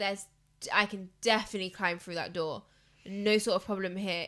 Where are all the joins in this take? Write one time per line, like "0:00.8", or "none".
none